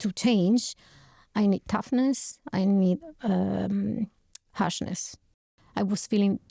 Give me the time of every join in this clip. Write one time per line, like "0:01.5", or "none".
0:05.5